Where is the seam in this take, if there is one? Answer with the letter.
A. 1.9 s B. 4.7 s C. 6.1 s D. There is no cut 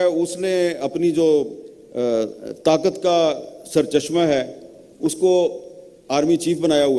D